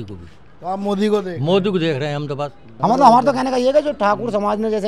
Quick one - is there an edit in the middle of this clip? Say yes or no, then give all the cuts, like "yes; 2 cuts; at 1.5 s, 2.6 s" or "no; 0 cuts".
yes; 1 cut; at 2.6 s